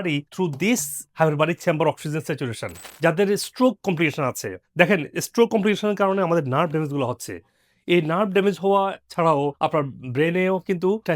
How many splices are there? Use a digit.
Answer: 1